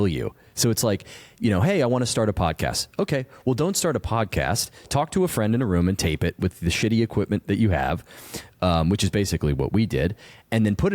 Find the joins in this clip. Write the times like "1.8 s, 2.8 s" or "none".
none